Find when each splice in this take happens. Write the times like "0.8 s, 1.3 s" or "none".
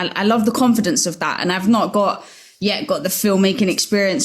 none